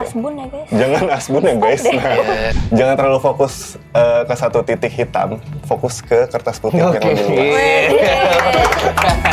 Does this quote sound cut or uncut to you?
cut